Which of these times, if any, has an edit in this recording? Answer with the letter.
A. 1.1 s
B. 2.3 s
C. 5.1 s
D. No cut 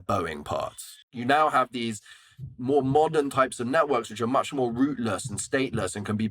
A